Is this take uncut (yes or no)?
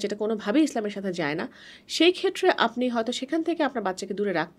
yes